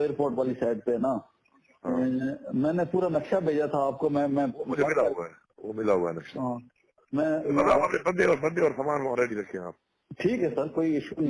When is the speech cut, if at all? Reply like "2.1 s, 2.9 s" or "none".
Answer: 6.7 s